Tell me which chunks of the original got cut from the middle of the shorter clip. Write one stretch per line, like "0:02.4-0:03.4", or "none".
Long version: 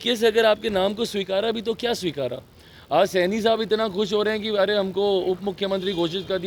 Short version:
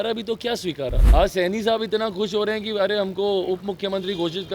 0:02.4-0:02.8

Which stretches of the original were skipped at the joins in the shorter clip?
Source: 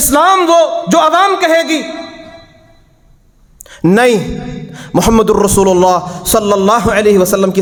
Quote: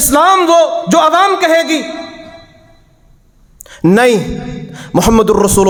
none

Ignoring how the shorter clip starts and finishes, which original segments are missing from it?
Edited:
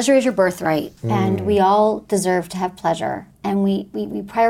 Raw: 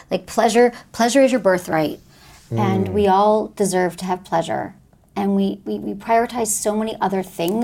0:02.0-0:02.4
0:04.8-0:05.0

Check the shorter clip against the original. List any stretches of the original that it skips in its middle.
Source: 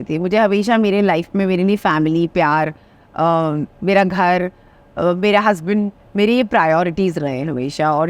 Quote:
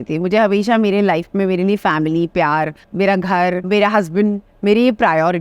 0:02.8-0:03.7
0:04.5-0:05.2

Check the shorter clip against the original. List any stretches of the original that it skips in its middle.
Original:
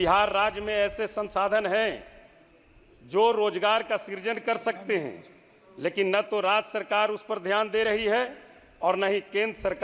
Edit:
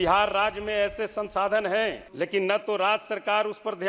0:02.0-0:05.7

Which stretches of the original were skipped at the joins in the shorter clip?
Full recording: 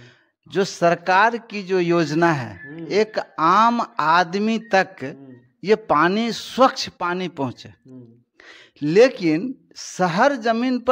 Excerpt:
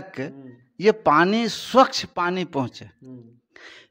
none

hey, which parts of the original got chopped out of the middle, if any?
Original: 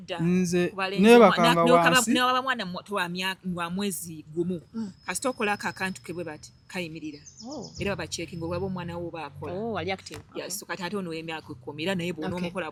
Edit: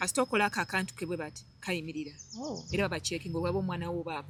none

